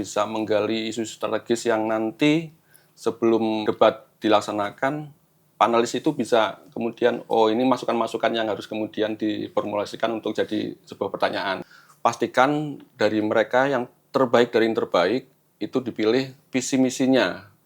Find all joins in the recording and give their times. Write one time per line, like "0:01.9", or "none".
0:03.6
0:11.6